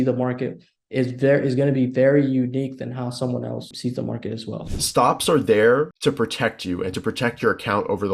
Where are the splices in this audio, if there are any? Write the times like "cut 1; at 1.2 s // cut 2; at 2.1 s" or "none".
cut 1; at 3.7 s // cut 2; at 4.6 s // cut 3; at 5.9 s

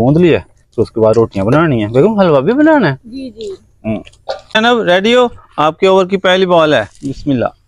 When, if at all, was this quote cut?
cut 1; at 4.4 s

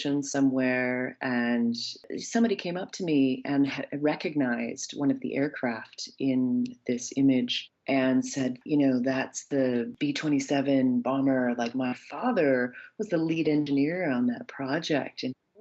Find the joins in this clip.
cut 1; at 2.1 s

